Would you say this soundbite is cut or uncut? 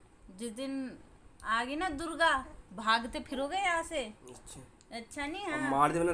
uncut